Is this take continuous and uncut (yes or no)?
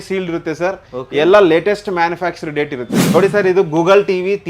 no